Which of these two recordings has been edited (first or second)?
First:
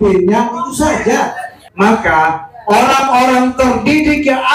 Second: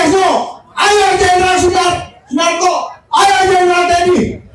first